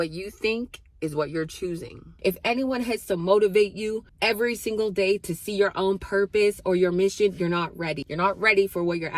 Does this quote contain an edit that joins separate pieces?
yes; 2 cuts; at 2.1 s, 4.1 s

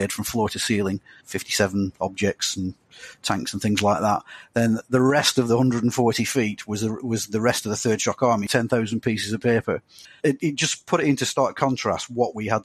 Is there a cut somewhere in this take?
yes; 3 cuts; at 1.3 s, 8.5 s, 10.2 s

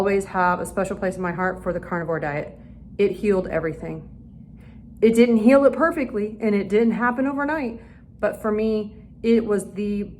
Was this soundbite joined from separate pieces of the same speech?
no; 0 cuts

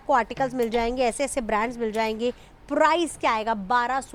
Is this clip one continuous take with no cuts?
yes; 0 cuts

